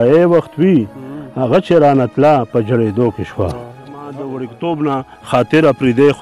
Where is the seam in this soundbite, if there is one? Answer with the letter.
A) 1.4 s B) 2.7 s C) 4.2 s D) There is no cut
C